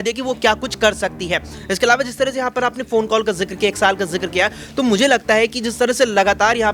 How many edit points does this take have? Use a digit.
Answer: 0